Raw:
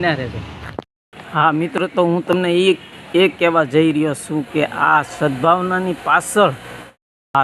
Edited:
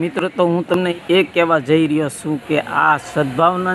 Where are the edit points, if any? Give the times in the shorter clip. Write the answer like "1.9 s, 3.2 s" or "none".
0.9 s